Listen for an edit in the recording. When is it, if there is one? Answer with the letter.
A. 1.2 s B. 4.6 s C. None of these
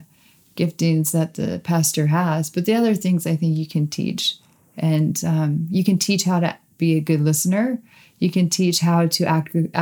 C